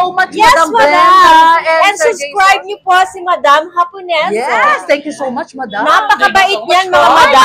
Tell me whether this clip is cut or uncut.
uncut